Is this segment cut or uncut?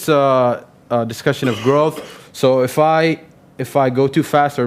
cut